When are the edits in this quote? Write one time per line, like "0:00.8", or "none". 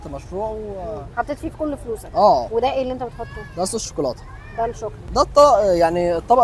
0:02.5
0:05.0

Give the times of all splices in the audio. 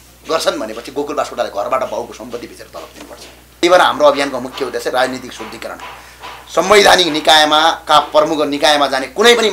0:03.6

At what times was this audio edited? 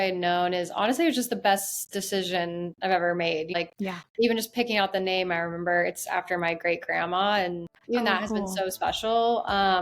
0:03.6
0:07.7

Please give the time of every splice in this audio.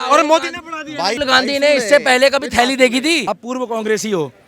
0:01.2
0:03.2

